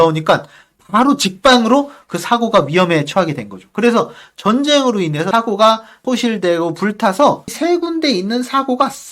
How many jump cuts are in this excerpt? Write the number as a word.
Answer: three